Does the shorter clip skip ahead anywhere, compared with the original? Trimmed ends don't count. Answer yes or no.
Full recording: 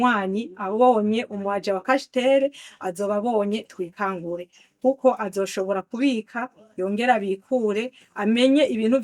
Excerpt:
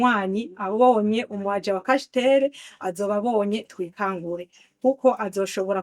no